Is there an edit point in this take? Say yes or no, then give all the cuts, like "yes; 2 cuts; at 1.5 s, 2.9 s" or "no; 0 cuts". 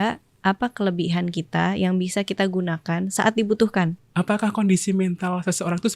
yes; 1 cut; at 4.0 s